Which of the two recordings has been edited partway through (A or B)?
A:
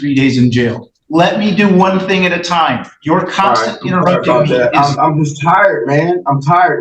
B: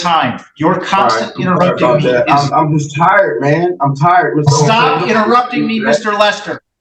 A